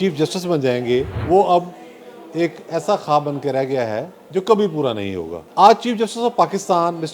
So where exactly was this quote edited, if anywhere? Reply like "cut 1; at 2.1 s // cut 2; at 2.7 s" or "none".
cut 1; at 1.2 s // cut 2; at 5.4 s